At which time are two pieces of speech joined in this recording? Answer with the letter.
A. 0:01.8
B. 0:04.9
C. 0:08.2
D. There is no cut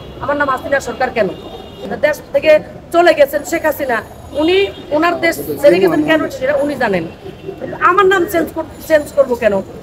A